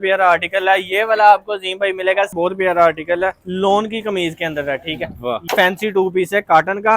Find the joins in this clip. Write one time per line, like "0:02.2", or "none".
0:02.3
0:05.4